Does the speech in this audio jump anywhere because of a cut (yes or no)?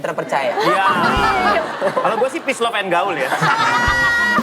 yes